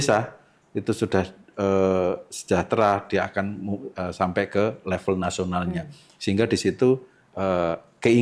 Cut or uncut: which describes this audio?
uncut